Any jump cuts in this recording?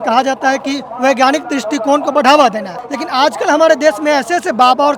no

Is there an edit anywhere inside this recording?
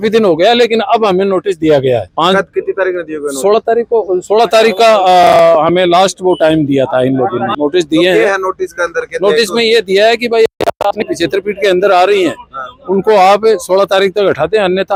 no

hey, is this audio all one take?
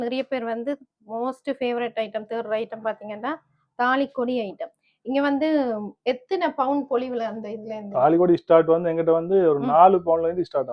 yes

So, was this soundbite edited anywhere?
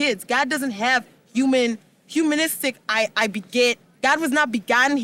no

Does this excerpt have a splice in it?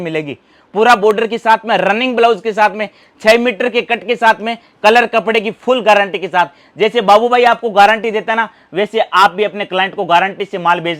no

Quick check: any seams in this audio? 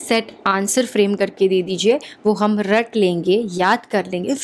no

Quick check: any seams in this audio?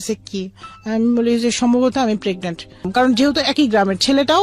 yes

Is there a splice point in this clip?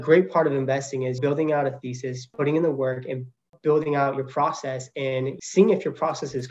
yes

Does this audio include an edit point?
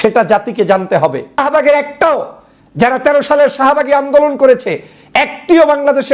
yes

